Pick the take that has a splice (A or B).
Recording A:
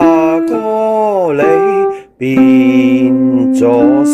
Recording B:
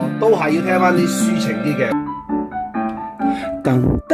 B